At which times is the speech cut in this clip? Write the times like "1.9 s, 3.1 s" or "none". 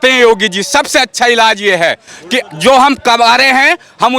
none